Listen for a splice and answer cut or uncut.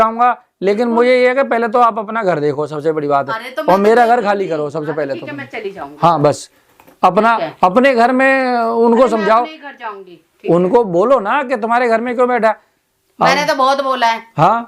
uncut